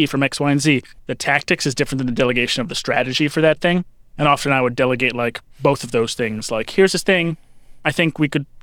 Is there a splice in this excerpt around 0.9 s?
yes; 1 cut; at 0.9 s

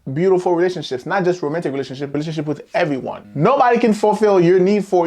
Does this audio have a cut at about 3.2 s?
yes; 2 cuts; at 2.1 s, 3.2 s

